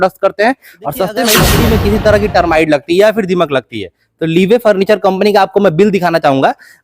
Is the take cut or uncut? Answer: cut